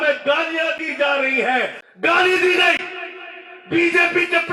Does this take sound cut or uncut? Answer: cut